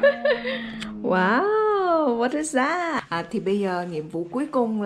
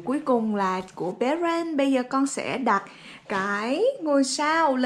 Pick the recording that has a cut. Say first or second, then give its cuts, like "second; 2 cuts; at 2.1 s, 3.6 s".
first; 1 cut; at 3.0 s